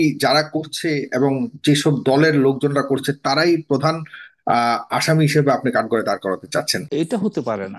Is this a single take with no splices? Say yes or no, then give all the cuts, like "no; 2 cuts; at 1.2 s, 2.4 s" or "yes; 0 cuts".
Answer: no; 1 cut; at 6.8 s